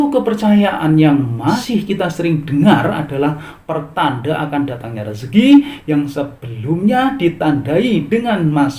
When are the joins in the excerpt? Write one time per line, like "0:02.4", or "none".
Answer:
0:01.6